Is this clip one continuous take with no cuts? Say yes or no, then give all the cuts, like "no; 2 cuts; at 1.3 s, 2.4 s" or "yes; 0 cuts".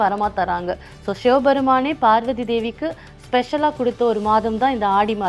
yes; 0 cuts